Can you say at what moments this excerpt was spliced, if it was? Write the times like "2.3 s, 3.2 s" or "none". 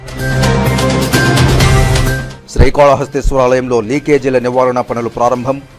none